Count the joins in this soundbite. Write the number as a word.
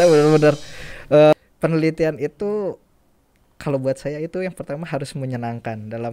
one